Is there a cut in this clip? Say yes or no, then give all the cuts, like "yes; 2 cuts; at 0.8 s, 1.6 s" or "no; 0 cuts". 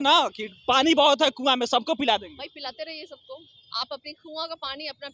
no; 0 cuts